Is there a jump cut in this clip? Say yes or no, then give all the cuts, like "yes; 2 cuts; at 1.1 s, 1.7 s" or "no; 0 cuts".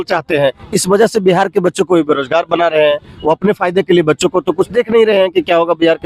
no; 0 cuts